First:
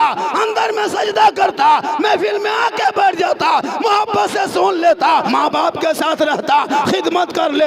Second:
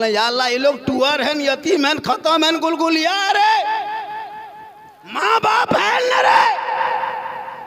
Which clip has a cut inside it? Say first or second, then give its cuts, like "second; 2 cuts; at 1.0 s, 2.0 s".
first; 1 cut; at 5.3 s